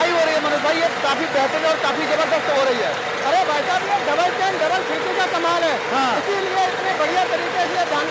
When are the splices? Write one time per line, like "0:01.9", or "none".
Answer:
none